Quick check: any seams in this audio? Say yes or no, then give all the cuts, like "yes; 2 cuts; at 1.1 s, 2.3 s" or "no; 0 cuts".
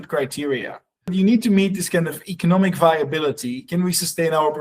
yes; 1 cut; at 1.1 s